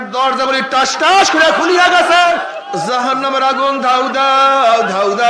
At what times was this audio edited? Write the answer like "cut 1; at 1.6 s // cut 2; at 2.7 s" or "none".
cut 1; at 2.5 s